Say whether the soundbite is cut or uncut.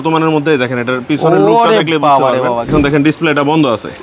cut